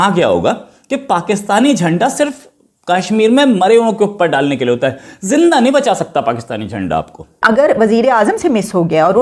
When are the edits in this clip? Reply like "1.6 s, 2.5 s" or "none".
7.4 s